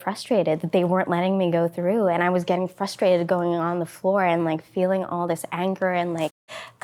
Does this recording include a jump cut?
no; 0 cuts

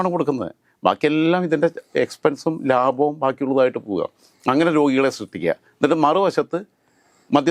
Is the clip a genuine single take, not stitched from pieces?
yes; 0 cuts

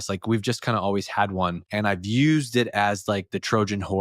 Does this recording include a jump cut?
yes; 1 cut; at 1.6 s

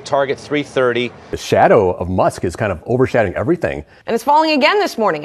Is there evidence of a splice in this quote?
yes; 2 cuts; at 1.3 s, 3.9 s

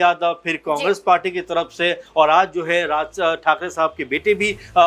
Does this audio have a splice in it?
no; 0 cuts

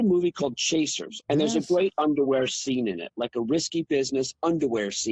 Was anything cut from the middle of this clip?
yes; 1 cut; at 1.1 s

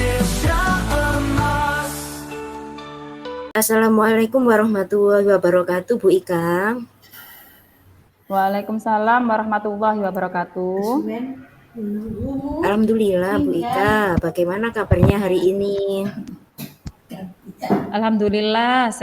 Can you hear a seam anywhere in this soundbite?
yes; 1 cut; at 3.4 s

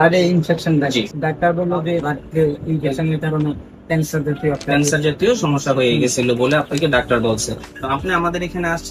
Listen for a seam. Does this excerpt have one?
yes; 3 cuts; at 1.1 s, 2.1 s, 7.7 s

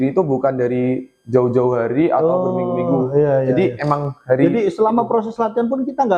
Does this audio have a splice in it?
no; 0 cuts

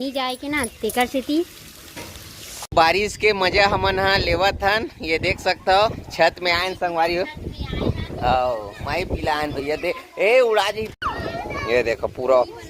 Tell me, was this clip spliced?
yes; 2 cuts; at 2.7 s, 10.9 s

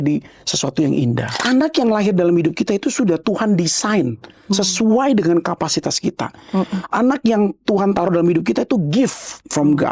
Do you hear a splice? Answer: yes; 1 cut; at 1.4 s

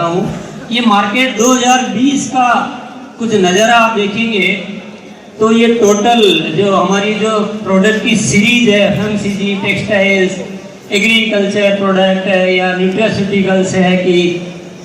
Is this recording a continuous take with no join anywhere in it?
yes; 0 cuts

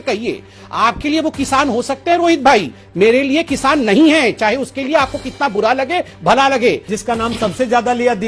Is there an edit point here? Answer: yes; 1 cut; at 6.9 s

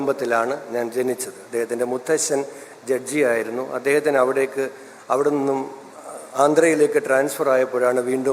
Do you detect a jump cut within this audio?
no; 0 cuts

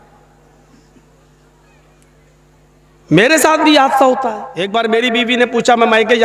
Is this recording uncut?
no; 1 cut; at 4.5 s

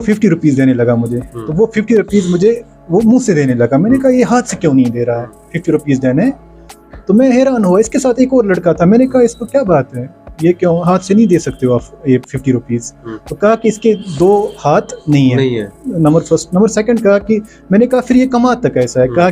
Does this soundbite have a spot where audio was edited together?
no; 0 cuts

